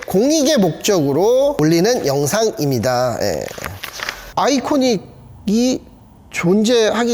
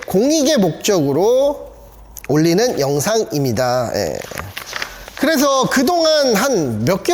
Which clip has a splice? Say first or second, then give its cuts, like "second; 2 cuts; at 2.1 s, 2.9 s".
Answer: first; 2 cuts; at 1.6 s, 4.2 s